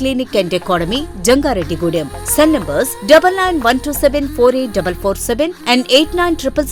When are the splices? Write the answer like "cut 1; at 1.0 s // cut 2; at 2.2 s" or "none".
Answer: none